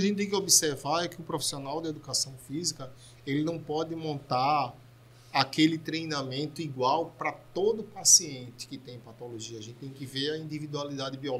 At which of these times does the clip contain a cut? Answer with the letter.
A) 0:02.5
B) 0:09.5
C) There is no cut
C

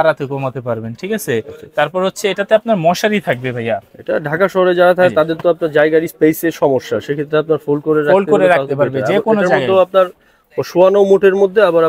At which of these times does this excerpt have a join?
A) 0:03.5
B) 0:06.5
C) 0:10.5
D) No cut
D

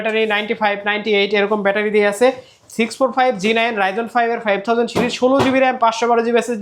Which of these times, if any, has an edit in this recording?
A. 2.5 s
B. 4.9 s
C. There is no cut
C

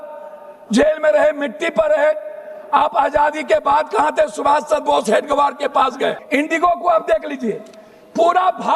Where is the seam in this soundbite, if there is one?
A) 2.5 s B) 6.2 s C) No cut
B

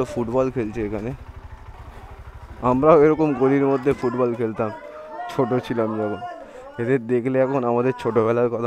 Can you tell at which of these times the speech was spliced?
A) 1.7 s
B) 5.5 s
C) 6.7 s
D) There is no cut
A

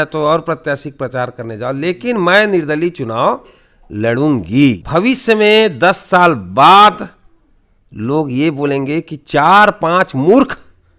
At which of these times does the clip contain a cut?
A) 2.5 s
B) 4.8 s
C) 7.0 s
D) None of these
B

